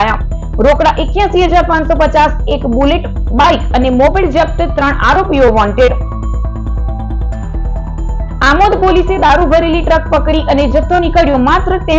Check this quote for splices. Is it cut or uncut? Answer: uncut